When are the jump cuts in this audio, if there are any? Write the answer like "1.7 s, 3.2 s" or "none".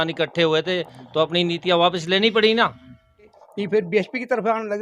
3.4 s

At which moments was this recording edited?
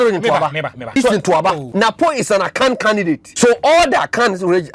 1.0 s, 1.6 s, 3.3 s

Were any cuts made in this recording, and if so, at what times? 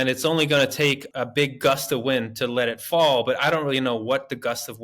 1.0 s

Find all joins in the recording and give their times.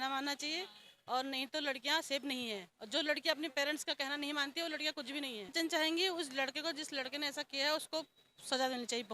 5.5 s

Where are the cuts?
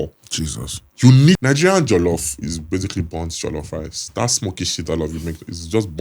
1.4 s

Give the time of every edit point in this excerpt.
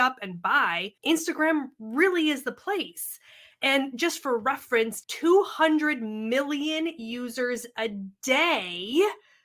5.0 s

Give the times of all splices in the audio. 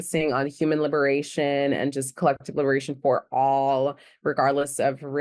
none

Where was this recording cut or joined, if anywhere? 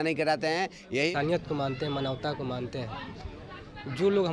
1.1 s

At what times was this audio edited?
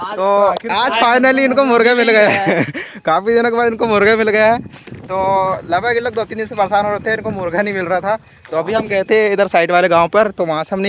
none

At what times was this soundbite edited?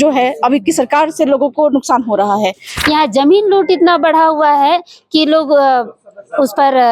2.7 s

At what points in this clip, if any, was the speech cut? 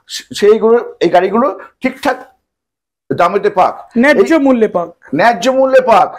none

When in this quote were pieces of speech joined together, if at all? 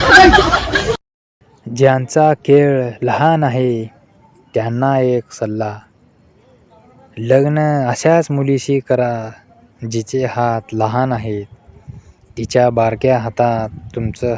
1.1 s

